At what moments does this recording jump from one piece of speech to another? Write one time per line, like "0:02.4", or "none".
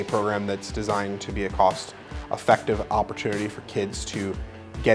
none